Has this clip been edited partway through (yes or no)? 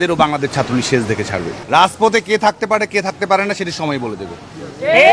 yes